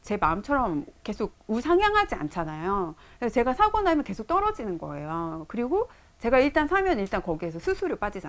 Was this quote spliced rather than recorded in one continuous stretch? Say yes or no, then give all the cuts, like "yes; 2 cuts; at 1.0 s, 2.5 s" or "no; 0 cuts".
no; 0 cuts